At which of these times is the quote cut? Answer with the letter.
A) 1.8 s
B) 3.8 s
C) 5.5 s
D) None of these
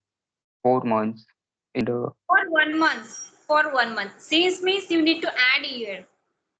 A